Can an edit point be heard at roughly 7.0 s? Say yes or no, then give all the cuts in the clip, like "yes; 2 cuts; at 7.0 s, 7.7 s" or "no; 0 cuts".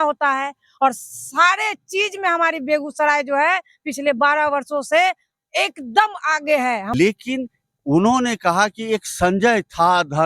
yes; 1 cut; at 7.0 s